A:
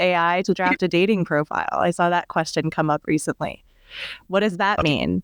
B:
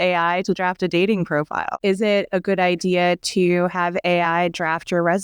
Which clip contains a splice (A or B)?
B